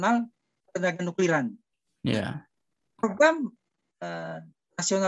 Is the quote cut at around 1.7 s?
no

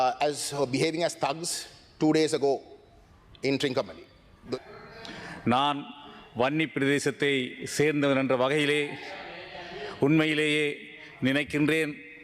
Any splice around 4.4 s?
yes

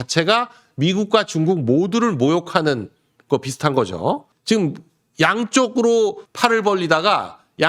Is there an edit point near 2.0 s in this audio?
no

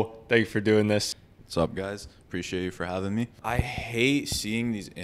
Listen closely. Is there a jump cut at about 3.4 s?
yes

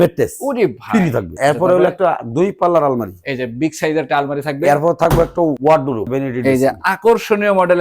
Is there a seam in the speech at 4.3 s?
no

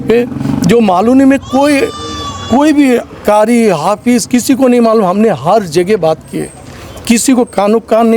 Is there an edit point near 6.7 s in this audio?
no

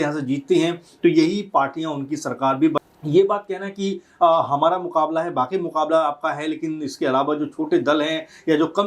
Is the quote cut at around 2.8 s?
yes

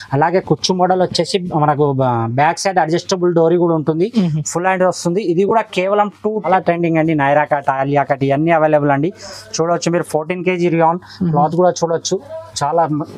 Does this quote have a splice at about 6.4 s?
yes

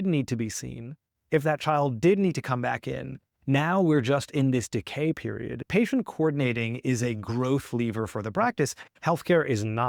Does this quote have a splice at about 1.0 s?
no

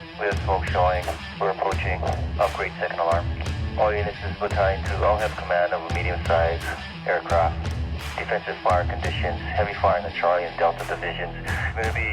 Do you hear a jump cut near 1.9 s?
yes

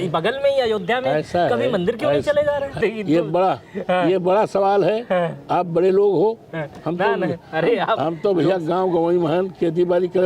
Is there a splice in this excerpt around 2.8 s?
yes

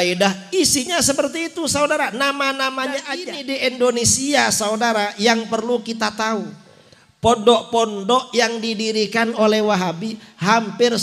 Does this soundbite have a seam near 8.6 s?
no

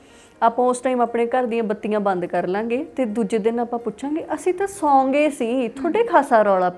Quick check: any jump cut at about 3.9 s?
no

